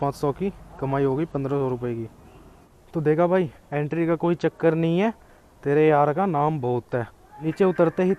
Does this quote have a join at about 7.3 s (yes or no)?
yes